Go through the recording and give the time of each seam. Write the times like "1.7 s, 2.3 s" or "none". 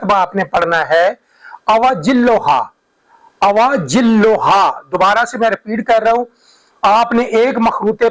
none